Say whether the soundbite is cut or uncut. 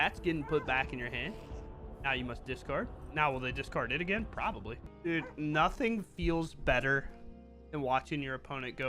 cut